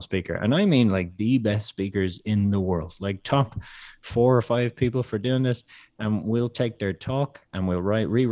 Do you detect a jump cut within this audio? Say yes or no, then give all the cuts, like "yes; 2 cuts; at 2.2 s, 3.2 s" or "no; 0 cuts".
no; 0 cuts